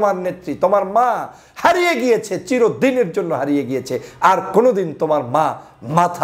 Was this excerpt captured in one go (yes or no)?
yes